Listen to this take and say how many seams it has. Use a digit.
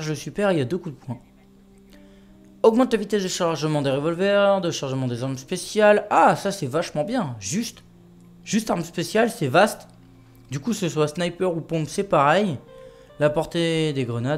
0